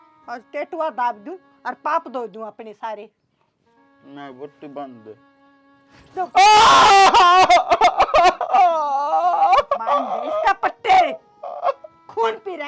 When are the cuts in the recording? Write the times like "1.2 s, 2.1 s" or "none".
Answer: none